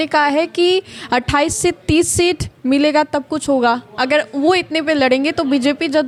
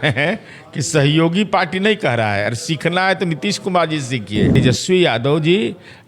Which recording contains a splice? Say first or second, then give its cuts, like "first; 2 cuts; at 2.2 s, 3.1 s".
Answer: second; 1 cut; at 4.6 s